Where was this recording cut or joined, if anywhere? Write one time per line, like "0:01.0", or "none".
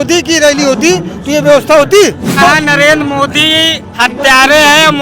0:02.4